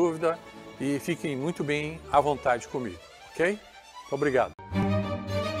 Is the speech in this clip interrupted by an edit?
yes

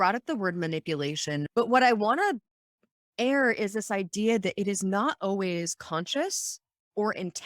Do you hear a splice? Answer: yes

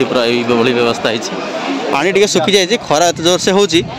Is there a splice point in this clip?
yes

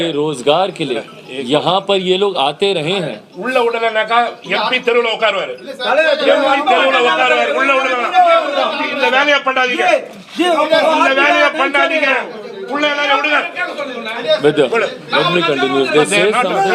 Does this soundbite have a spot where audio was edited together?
no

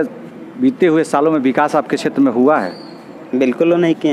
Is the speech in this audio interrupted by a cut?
no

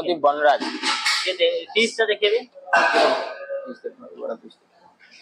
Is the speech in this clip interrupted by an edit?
no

